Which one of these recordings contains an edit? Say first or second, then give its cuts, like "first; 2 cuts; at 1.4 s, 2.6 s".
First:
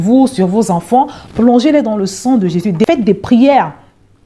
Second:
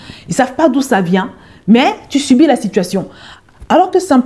first; 1 cut; at 2.9 s